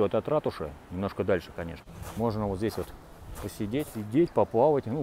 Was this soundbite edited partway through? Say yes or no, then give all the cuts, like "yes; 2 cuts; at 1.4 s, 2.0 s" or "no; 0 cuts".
yes; 2 cuts; at 2.3 s, 3.9 s